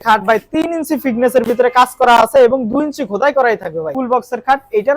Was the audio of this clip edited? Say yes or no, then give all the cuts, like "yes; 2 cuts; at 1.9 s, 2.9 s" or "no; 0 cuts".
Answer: yes; 1 cut; at 3.9 s